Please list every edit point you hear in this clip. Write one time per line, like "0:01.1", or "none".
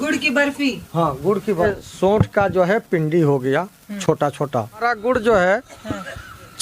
0:01.6
0:04.8

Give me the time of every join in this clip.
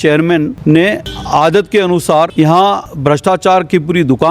0:00.9
0:02.6

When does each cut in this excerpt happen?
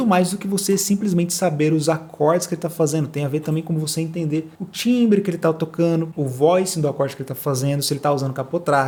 none

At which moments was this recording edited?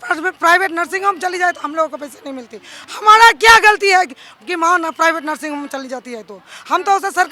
none

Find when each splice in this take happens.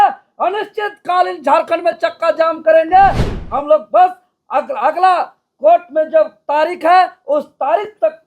0:03.3

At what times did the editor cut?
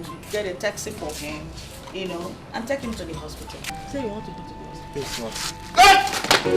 0:03.6

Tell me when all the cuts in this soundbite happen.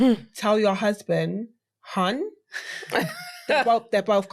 none

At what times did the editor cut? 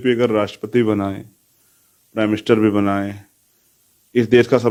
none

